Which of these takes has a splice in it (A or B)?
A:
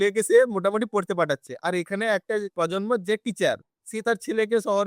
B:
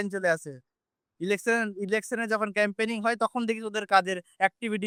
A